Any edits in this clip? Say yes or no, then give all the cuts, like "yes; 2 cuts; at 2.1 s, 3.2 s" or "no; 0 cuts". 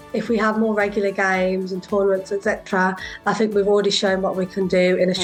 no; 0 cuts